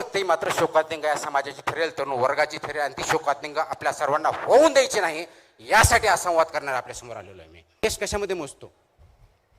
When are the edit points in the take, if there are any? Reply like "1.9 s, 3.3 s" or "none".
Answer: 7.8 s